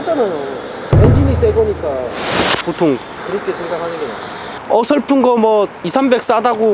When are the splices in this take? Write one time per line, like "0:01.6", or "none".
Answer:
0:03.1
0:04.6